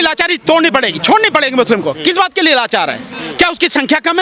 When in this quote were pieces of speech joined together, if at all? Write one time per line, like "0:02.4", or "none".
none